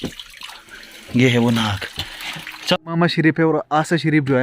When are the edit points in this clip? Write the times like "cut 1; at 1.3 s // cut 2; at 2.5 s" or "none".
cut 1; at 2.9 s